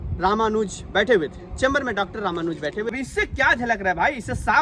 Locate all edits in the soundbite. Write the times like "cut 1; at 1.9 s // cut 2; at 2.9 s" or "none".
cut 1; at 2.9 s

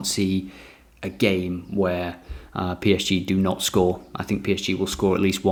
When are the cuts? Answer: none

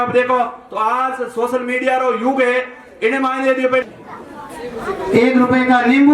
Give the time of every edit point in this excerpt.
cut 1; at 3.8 s

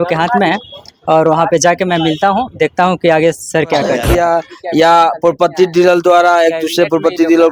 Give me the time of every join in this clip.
cut 1; at 4.1 s

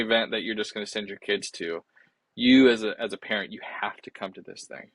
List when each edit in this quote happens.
none

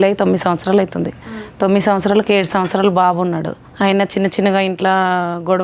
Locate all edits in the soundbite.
cut 1; at 3.6 s

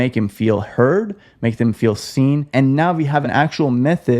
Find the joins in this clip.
cut 1; at 2.4 s // cut 2; at 3.3 s

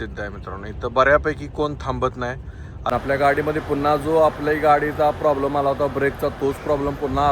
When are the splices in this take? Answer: cut 1; at 2.8 s

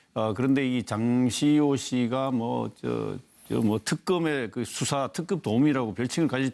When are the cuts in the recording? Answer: none

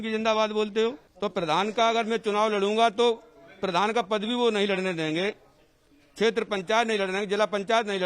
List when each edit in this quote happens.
cut 1; at 1.1 s

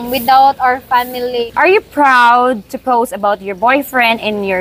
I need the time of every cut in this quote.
cut 1; at 1.5 s

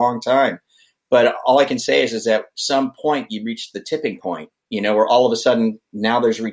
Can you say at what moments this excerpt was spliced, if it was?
none

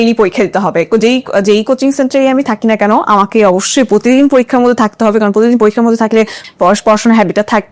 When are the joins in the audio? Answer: cut 1; at 6.4 s

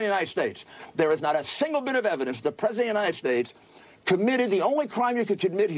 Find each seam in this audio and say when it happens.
cut 1; at 1.0 s

